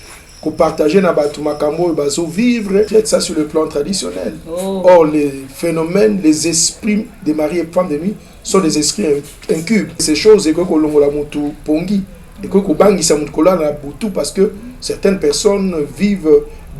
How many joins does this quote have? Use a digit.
2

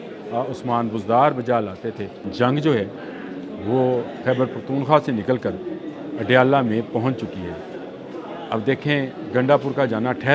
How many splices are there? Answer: 1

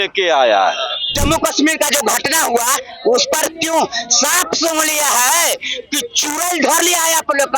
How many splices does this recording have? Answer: 1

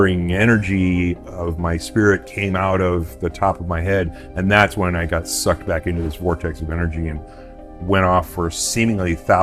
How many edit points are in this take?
0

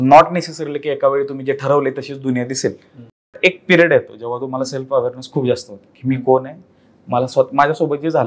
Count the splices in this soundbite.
1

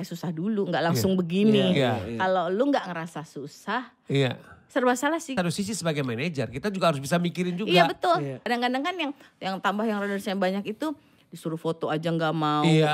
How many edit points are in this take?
2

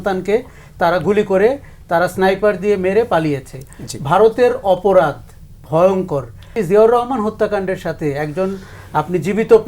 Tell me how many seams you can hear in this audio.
1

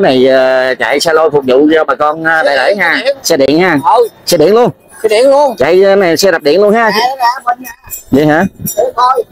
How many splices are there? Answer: 0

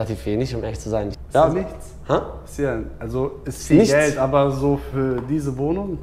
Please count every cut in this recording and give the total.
1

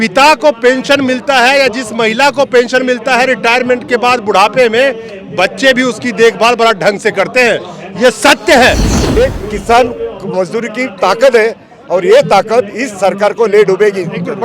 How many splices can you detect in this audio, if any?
1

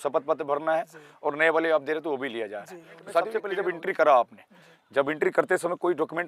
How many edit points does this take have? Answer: 1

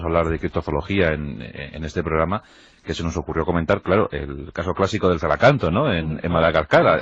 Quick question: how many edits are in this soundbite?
1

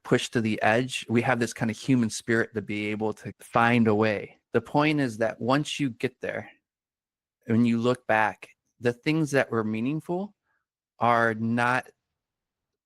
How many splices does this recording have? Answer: 1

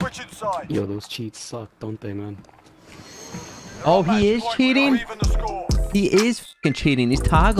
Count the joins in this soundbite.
0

